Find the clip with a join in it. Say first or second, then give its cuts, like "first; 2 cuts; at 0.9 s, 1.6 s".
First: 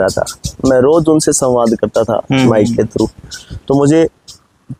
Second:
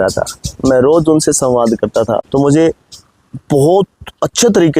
second; 1 cut; at 2.2 s